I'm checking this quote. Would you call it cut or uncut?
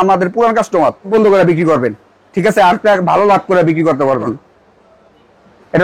cut